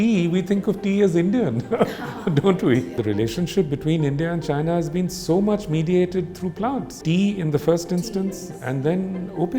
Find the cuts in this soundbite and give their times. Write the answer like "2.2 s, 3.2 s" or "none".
3.0 s, 6.9 s